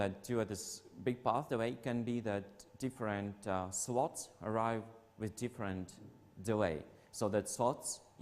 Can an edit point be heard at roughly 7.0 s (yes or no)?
yes